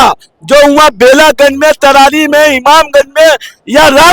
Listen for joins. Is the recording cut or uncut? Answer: uncut